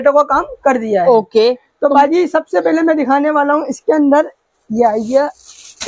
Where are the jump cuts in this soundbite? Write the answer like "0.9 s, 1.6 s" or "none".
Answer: none